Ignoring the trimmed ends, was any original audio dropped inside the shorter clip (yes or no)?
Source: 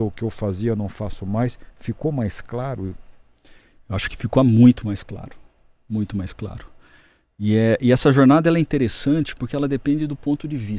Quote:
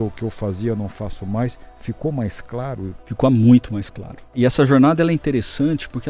yes